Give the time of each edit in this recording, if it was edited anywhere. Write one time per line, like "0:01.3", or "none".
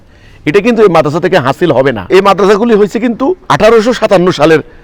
0:02.0
0:03.4